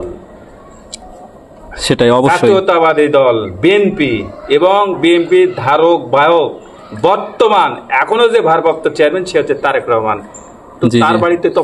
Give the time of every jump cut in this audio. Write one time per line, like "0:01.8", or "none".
none